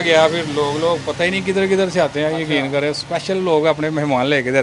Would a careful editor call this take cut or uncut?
uncut